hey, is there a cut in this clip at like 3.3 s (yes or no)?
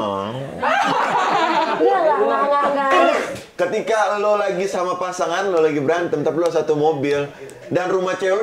yes